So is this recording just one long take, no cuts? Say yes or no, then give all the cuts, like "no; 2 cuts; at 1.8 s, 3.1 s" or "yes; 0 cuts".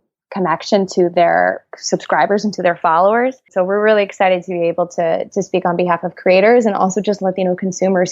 no; 1 cut; at 3.4 s